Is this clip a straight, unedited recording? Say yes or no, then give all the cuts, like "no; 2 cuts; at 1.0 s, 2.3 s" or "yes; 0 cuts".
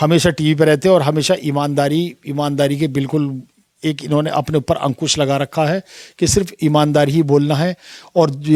yes; 0 cuts